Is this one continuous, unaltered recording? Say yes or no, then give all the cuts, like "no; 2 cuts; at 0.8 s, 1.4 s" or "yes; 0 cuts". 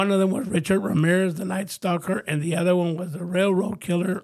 yes; 0 cuts